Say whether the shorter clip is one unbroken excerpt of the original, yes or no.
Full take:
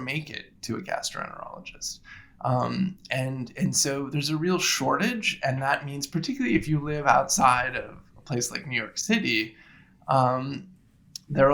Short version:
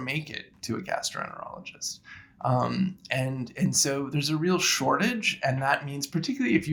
yes